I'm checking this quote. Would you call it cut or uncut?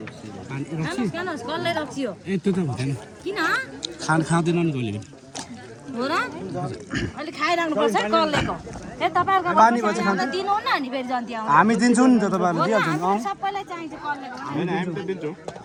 uncut